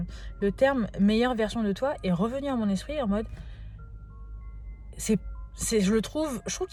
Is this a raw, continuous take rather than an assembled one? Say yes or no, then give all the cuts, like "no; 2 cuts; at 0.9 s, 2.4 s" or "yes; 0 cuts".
yes; 0 cuts